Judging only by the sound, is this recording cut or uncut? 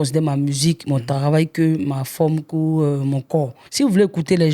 cut